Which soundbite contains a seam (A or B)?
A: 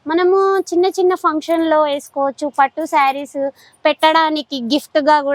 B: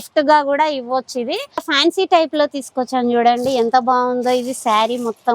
B